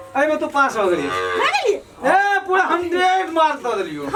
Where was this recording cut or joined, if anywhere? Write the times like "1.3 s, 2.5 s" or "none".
none